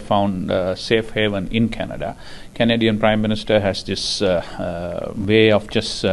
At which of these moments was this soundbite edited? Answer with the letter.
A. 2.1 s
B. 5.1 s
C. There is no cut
B